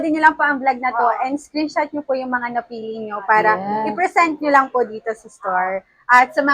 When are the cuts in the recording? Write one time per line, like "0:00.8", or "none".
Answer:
none